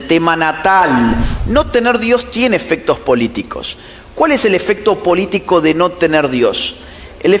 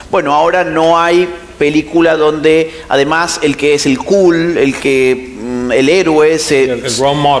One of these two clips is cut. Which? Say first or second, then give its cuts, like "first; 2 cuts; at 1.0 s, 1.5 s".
first; 1 cut; at 1.3 s